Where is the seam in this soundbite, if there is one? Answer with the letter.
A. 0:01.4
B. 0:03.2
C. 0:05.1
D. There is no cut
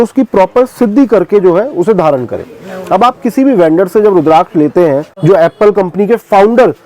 C